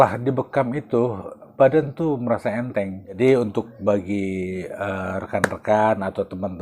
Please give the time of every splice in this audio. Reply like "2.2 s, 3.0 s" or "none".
1.4 s, 3.2 s